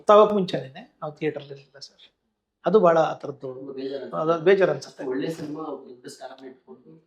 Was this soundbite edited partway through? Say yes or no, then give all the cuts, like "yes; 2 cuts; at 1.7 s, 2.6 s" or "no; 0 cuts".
no; 0 cuts